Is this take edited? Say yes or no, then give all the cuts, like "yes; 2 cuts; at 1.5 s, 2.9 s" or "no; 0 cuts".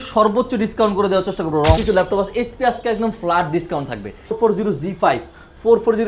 yes; 2 cuts; at 1.8 s, 4.3 s